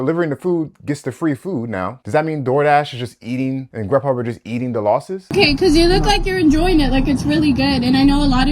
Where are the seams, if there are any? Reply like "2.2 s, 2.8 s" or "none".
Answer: 2.0 s, 3.7 s, 5.3 s

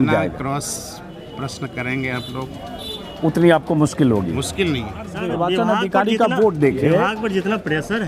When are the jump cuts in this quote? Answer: 5.1 s

